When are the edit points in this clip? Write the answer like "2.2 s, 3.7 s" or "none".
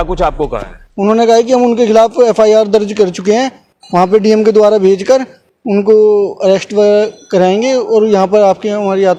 none